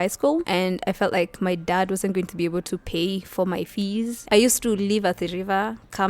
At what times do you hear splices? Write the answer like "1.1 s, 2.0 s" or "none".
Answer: 4.2 s